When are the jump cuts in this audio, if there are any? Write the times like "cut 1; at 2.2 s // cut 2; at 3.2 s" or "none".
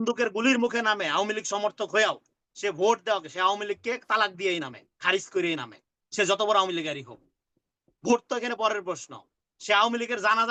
none